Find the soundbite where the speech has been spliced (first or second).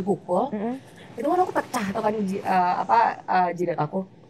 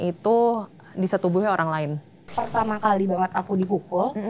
second